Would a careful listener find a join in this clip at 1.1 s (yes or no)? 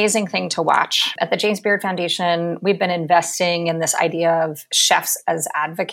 yes